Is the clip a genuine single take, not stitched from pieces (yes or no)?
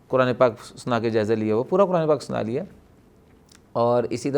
yes